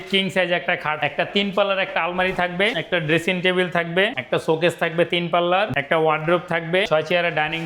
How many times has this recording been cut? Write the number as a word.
five